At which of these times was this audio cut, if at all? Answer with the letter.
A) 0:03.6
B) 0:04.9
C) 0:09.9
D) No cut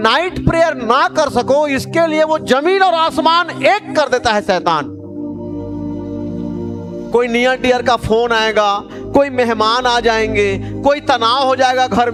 D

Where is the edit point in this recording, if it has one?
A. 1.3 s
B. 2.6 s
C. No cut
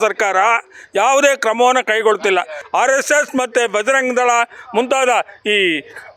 B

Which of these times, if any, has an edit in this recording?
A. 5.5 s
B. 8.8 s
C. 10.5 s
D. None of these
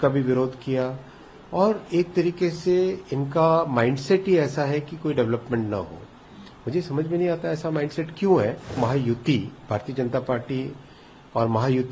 B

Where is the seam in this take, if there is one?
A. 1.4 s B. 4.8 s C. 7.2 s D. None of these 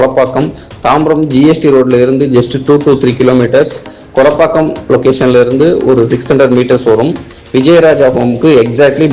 D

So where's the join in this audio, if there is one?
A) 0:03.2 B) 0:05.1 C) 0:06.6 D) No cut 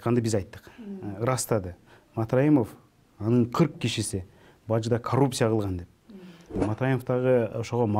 C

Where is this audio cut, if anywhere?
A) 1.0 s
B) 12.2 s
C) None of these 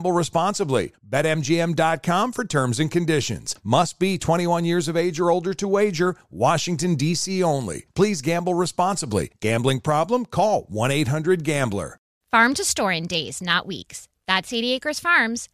B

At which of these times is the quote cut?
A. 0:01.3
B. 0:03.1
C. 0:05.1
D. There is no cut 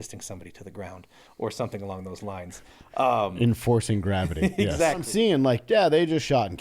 C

